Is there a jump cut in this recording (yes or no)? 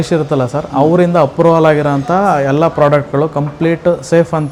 no